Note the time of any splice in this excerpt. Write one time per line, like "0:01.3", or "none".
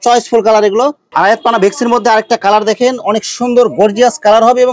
0:01.0